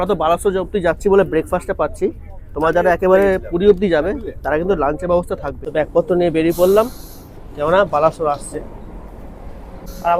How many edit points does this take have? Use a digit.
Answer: 0